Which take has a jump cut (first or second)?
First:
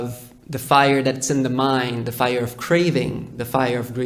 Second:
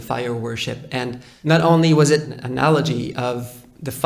second